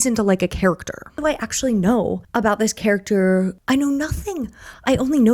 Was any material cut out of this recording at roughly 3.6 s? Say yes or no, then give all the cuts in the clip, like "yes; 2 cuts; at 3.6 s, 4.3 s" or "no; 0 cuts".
yes; 3 cuts; at 1.1 s, 2.2 s, 3.6 s